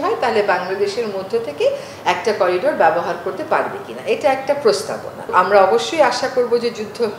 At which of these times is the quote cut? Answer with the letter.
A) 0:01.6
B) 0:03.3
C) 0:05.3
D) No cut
C